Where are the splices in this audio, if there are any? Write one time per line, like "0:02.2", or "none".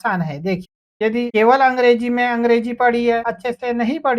0:00.9
0:03.3

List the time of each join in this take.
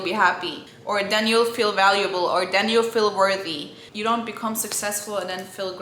0:03.8

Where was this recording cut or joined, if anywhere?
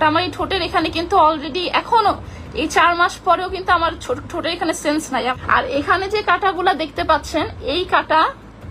0:05.3

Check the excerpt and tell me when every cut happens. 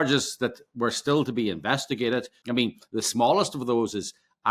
0:02.4

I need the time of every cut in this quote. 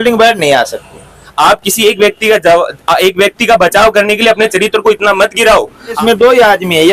0:01.2
0:06.0

